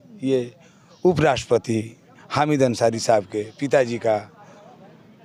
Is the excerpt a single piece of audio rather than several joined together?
yes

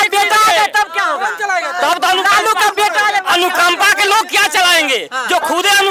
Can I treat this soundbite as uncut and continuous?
yes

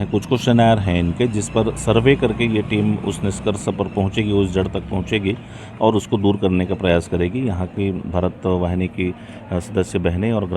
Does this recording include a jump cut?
no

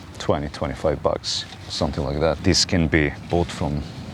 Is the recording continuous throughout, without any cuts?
no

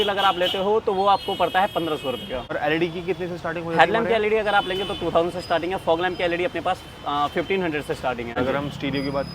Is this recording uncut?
no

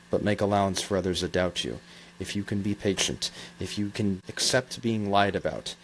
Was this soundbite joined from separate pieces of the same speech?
yes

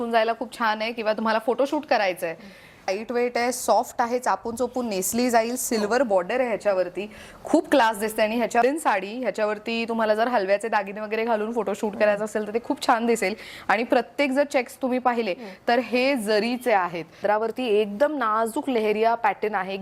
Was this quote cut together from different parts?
yes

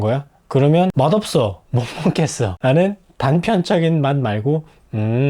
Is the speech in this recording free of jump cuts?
no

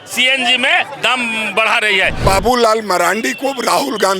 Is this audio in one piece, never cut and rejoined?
no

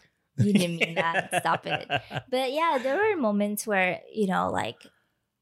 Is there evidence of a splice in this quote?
no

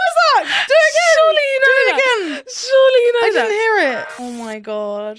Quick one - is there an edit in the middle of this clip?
yes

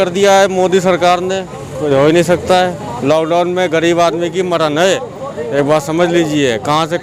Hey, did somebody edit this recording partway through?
no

